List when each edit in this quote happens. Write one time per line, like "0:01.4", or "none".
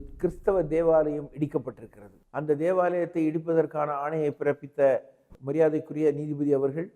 none